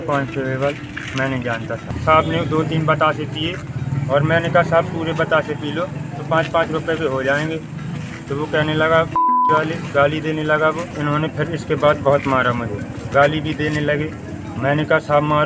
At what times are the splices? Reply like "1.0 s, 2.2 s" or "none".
1.9 s, 10.9 s